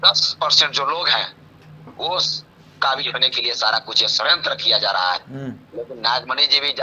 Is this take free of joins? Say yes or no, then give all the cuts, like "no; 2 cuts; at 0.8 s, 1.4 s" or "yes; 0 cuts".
yes; 0 cuts